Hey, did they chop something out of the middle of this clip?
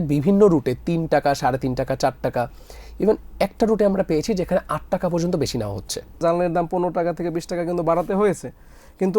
yes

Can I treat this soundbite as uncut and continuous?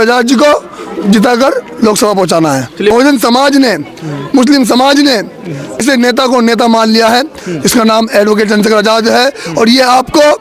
no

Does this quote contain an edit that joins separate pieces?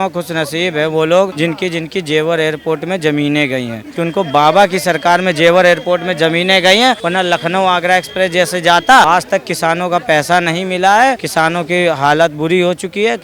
yes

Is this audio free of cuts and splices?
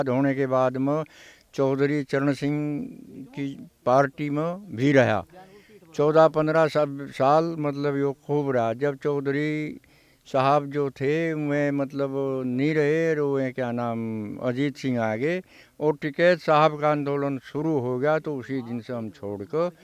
yes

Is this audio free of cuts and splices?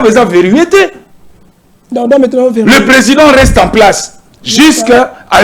yes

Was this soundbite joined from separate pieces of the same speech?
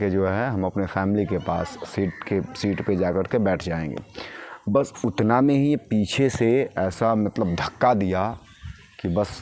no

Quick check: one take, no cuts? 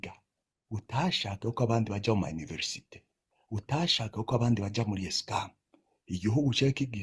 yes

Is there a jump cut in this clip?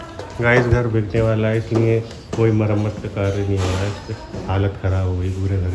no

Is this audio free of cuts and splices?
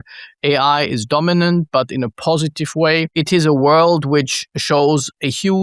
no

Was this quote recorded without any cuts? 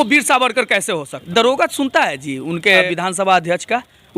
no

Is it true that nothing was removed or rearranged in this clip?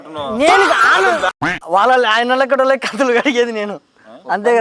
no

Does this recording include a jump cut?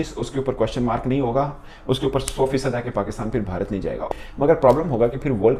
no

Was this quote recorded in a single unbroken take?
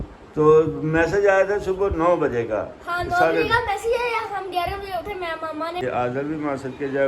no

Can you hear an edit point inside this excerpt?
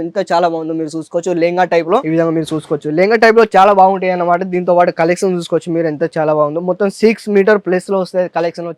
no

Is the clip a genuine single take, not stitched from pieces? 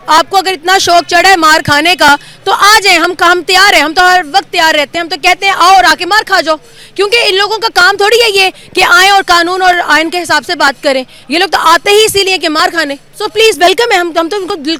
yes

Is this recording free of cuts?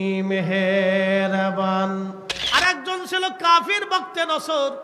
no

